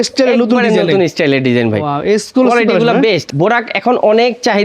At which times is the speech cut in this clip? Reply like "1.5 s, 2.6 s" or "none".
3.2 s

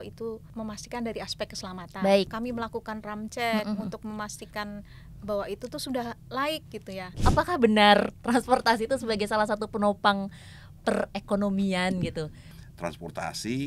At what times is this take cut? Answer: 2.3 s, 7.1 s, 12.6 s

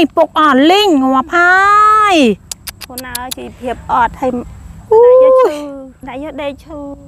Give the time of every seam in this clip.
5.9 s

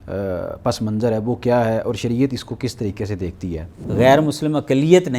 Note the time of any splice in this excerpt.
3.8 s

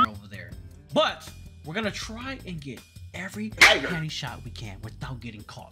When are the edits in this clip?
none

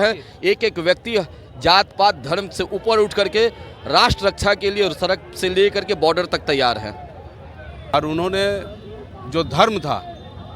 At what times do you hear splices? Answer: 7.9 s

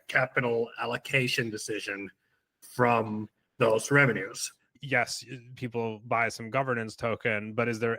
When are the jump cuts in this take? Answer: 2.6 s, 4.7 s

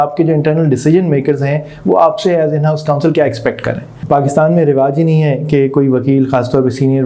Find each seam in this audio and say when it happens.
3.9 s

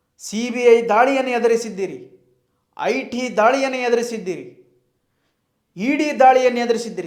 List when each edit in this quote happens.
none

